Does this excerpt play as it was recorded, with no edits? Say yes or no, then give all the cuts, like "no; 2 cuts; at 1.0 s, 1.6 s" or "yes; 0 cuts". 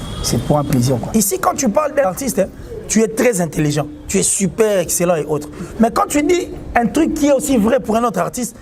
no; 2 cuts; at 1.0 s, 2.1 s